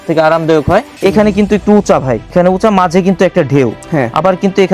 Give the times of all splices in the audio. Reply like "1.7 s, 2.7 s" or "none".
0.9 s, 2.3 s